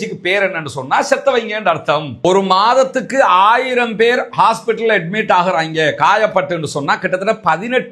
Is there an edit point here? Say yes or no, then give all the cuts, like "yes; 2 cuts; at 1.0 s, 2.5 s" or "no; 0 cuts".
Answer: yes; 1 cut; at 2.1 s